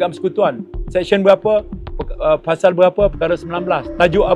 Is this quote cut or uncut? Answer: uncut